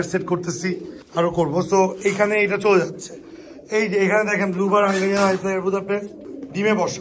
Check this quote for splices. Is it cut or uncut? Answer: cut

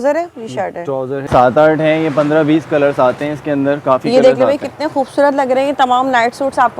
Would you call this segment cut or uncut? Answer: cut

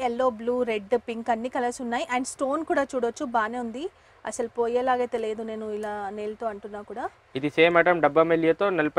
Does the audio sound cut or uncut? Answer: uncut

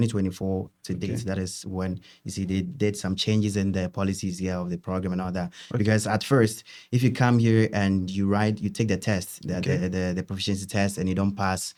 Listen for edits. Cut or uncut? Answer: uncut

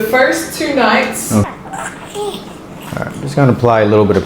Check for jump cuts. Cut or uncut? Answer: cut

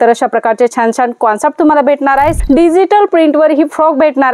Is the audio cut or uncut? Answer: cut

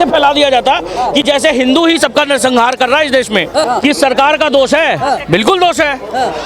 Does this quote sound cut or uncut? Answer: cut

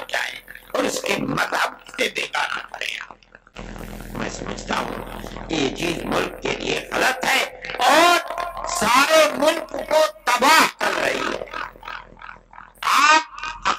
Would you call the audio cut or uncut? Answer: uncut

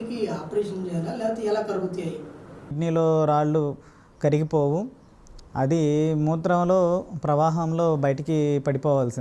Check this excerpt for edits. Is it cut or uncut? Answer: cut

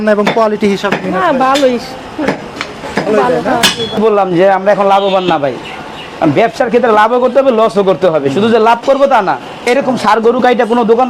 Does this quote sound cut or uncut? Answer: cut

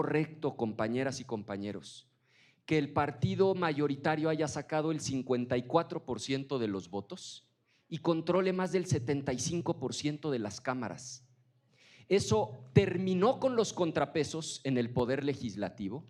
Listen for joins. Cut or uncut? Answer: uncut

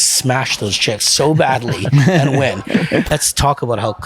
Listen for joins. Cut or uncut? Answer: cut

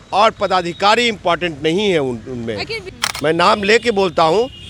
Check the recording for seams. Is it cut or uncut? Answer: cut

